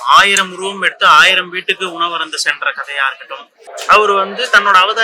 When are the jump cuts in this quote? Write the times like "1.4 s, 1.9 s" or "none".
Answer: 3.7 s